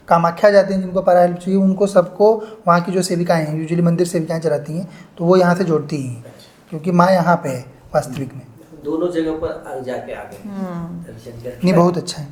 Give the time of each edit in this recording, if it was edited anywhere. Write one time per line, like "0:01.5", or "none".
none